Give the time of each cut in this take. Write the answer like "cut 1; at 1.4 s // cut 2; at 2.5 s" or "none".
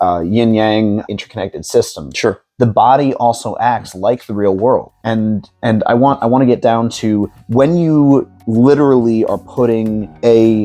cut 1; at 1.0 s